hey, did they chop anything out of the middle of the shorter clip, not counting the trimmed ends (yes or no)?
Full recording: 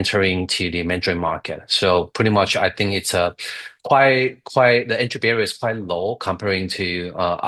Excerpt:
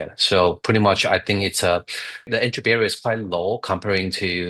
yes